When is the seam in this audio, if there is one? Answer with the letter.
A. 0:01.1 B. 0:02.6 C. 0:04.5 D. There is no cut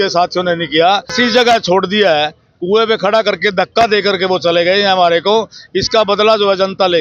A